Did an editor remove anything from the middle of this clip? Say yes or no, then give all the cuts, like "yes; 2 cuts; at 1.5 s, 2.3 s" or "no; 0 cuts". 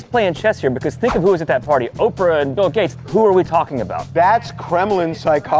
yes; 2 cuts; at 2.9 s, 4.1 s